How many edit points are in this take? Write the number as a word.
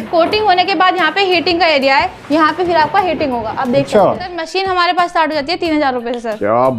one